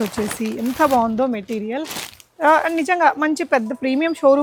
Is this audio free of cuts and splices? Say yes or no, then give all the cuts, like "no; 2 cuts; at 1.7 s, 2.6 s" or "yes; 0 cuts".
yes; 0 cuts